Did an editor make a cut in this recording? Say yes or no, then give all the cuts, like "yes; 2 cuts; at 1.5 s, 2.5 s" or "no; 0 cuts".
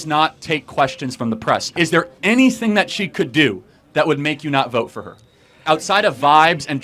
yes; 2 cuts; at 1.8 s, 5.6 s